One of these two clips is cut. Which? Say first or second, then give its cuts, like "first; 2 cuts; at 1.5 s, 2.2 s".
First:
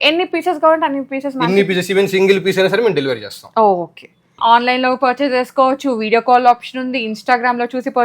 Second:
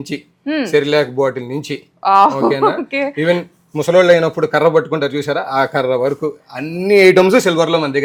first; 1 cut; at 4.3 s